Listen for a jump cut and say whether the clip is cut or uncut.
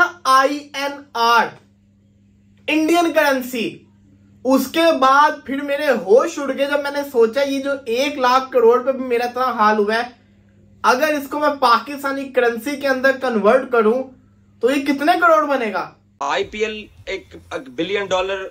cut